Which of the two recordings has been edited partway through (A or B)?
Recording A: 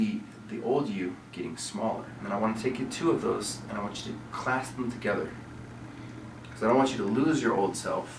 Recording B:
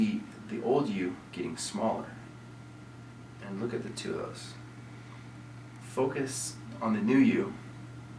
A